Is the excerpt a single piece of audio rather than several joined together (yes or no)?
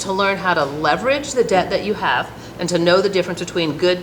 yes